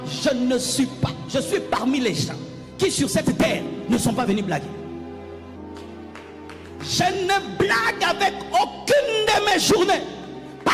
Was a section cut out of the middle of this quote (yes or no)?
no